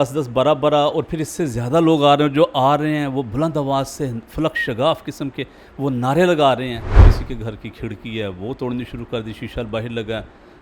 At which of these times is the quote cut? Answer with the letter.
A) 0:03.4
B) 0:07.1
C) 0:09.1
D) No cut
B